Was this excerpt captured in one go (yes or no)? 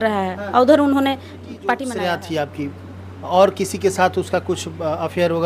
no